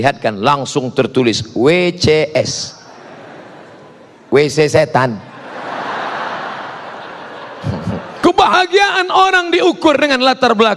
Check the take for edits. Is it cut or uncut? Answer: cut